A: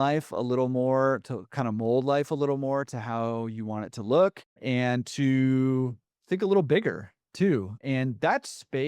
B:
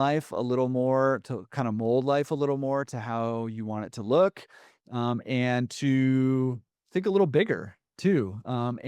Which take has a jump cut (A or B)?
A